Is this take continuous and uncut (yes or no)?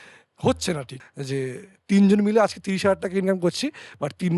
no